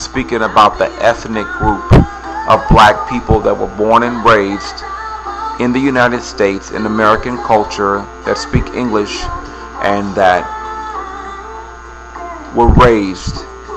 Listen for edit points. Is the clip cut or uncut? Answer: cut